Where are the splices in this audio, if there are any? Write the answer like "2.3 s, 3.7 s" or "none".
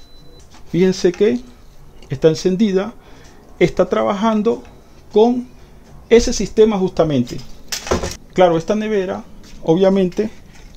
8.2 s